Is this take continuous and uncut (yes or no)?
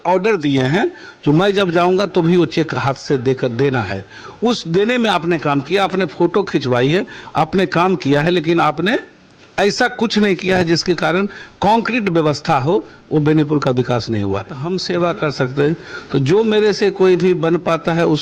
no